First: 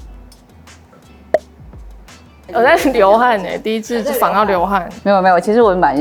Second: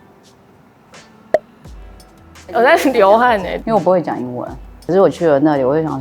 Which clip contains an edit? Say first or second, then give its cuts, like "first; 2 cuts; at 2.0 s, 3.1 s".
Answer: second; 1 cut; at 3.7 s